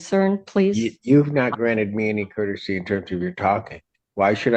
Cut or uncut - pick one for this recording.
uncut